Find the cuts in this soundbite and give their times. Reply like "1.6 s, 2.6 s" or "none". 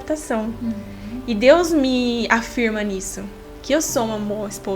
none